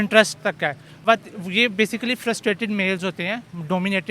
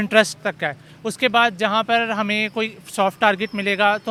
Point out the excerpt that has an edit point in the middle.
first; 1 cut; at 1.1 s

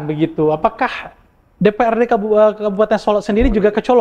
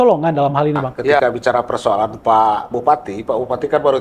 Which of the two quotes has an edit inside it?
second; 1 cut; at 1.2 s

